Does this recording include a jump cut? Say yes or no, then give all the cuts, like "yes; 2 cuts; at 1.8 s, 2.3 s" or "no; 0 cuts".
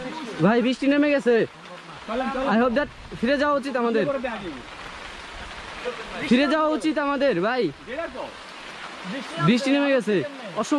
no; 0 cuts